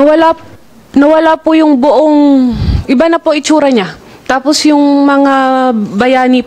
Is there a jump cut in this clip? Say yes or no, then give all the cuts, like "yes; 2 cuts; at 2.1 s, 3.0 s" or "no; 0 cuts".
no; 0 cuts